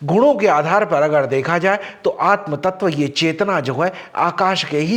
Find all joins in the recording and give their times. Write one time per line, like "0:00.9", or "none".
none